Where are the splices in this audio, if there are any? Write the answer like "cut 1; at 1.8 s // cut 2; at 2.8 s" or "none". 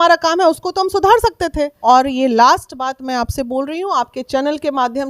cut 1; at 1.7 s